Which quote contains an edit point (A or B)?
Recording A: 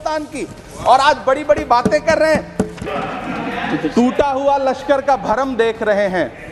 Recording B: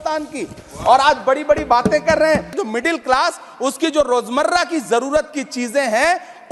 A